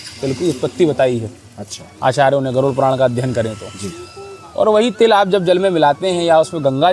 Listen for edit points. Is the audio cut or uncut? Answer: uncut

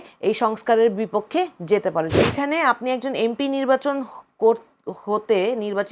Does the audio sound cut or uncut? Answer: cut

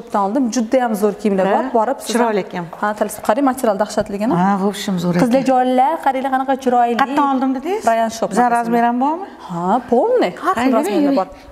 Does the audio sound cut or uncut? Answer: uncut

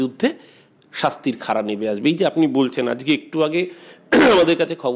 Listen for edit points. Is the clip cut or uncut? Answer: uncut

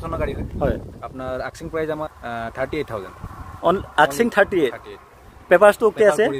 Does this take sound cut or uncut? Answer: uncut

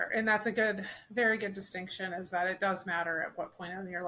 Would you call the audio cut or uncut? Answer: uncut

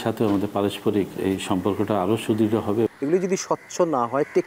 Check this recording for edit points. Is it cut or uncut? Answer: cut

